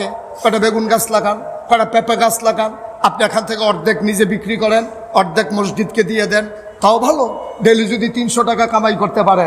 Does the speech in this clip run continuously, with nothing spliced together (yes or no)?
yes